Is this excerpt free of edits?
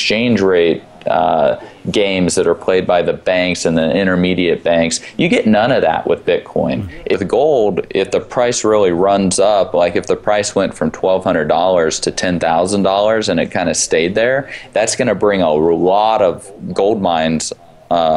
no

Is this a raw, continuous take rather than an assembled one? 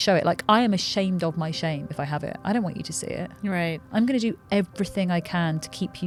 yes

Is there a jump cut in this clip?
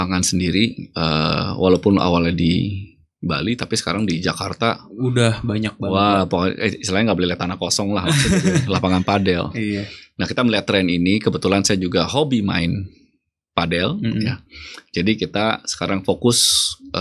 no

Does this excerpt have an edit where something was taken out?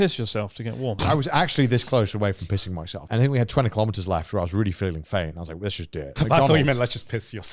yes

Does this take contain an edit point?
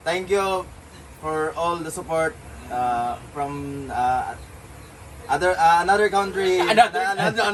no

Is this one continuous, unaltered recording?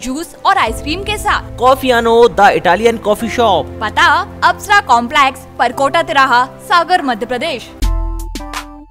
no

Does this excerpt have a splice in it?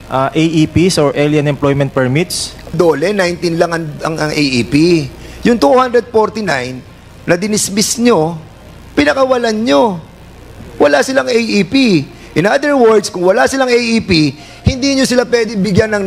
yes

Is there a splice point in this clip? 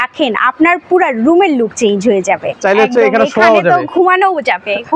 yes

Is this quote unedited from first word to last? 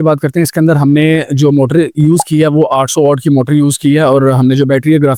yes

